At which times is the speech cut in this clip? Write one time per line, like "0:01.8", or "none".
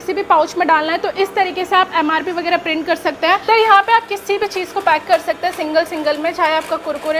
0:03.4

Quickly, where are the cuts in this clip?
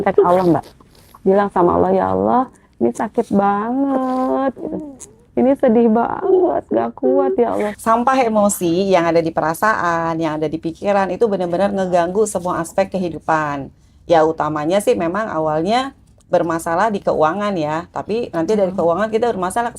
0:07.8

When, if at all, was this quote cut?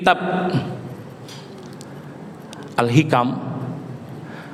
none

